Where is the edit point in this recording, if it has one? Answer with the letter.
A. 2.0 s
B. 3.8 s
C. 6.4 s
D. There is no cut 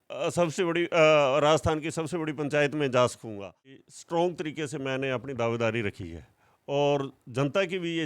B